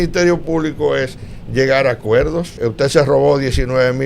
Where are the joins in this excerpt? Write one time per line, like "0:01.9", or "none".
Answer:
0:02.5